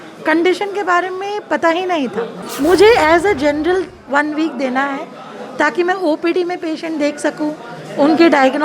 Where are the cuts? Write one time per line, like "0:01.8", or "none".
0:02.4